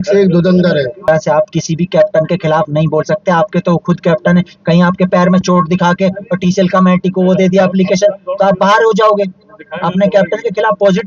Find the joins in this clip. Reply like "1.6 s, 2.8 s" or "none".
1.1 s